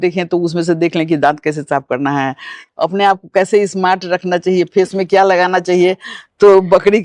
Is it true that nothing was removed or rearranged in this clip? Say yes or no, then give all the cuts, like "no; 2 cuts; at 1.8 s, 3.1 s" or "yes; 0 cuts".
no; 1 cut; at 2.6 s